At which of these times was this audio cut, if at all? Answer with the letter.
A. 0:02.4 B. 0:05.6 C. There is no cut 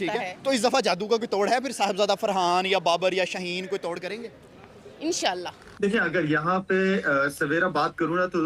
B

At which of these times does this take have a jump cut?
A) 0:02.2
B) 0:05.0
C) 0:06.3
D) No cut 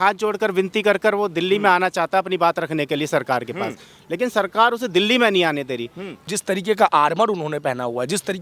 C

